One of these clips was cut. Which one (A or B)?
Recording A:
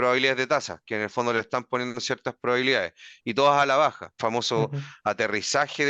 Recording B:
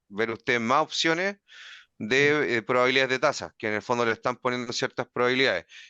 A